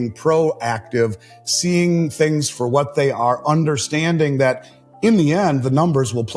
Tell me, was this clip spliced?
no; 0 cuts

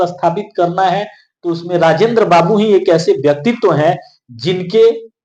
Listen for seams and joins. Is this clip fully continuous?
yes; 0 cuts

